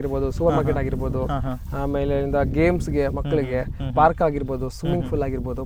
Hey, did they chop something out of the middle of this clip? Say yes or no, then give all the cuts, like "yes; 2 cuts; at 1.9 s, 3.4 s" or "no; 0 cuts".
no; 0 cuts